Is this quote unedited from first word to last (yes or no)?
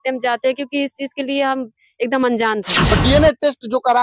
no